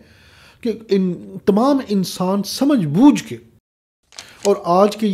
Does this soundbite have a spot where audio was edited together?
yes; 1 cut; at 3.8 s

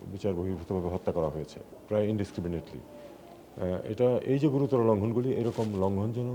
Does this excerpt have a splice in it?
yes; 1 cut; at 1.7 s

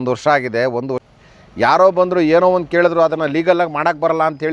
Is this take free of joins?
no; 1 cut; at 1.0 s

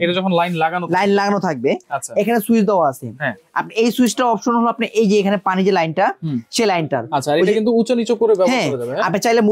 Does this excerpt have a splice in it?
no; 0 cuts

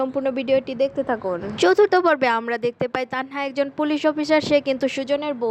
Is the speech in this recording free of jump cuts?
no; 1 cut; at 1.5 s

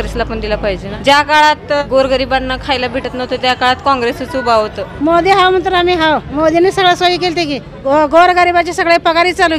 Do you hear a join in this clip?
yes; 5 cuts; at 0.9 s, 1.8 s, 4.8 s, 6.3 s, 7.7 s

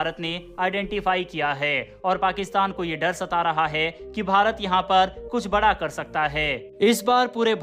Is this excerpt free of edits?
yes; 0 cuts

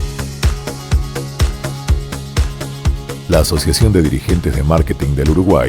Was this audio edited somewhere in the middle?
yes; 1 cut; at 2.8 s

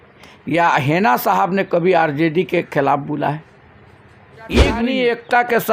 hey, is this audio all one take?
no; 1 cut; at 4.8 s

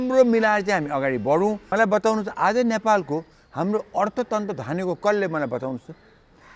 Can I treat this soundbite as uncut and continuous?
no; 1 cut; at 1.6 s

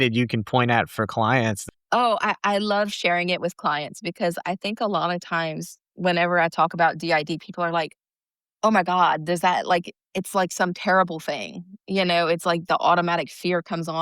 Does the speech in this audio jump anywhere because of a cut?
yes; 1 cut; at 1.6 s

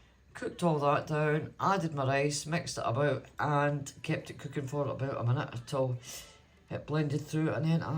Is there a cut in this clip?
no; 0 cuts

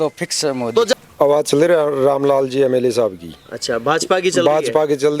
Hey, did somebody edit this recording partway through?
yes; 1 cut; at 1.0 s

